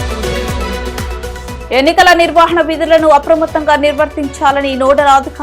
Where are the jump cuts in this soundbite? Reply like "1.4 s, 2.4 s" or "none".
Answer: 1.3 s